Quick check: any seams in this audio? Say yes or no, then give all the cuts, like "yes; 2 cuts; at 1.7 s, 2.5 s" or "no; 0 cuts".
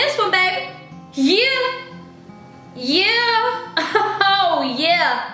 no; 0 cuts